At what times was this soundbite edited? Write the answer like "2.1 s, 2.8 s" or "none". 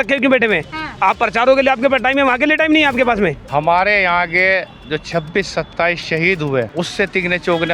3.4 s, 6.7 s